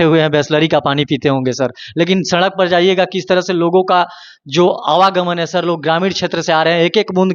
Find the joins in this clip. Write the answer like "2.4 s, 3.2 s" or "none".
none

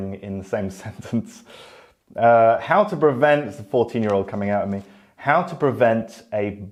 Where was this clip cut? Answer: none

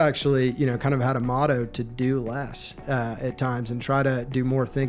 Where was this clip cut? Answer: none

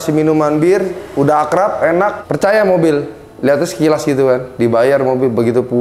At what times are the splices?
2.2 s

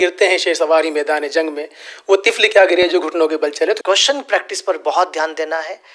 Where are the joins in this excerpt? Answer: 3.8 s

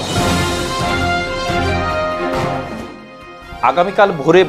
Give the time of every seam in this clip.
none

